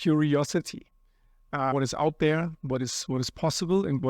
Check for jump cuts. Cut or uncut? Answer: cut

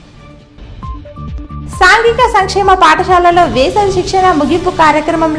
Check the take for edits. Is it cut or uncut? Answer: cut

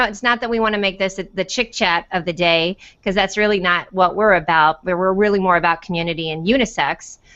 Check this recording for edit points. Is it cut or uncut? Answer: cut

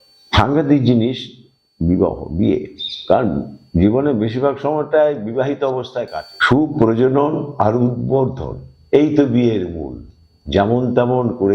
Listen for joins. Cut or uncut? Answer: cut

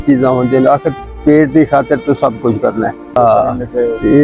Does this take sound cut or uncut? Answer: cut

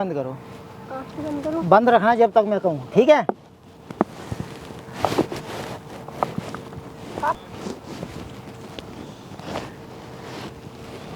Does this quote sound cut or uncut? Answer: cut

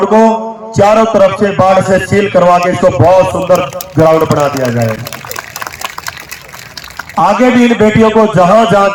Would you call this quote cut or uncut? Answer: uncut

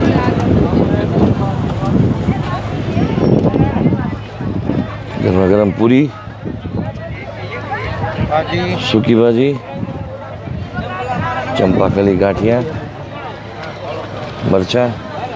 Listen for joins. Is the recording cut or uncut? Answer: uncut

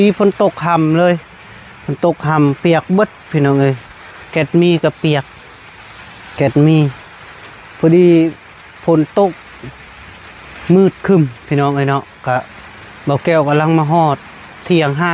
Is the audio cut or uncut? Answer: uncut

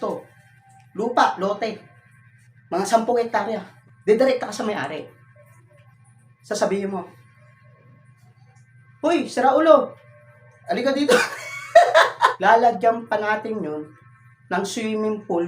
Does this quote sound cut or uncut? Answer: cut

